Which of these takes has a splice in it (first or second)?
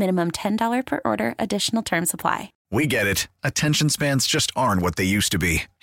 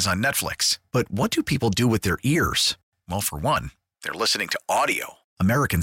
first